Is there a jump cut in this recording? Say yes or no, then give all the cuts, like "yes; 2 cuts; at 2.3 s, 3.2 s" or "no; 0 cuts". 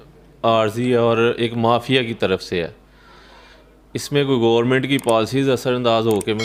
no; 0 cuts